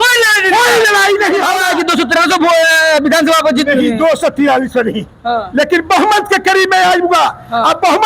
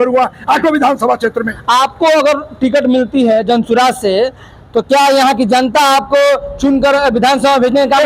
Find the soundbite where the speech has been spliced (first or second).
first